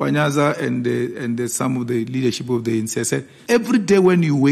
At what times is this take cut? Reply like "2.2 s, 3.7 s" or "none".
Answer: 3.3 s